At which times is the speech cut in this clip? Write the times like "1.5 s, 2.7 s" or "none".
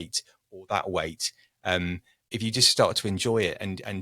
2.3 s